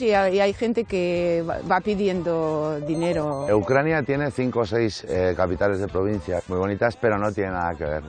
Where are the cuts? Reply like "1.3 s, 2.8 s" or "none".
3.4 s, 6.4 s